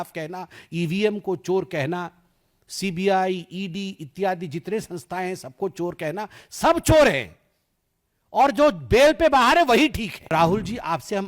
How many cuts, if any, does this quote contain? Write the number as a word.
one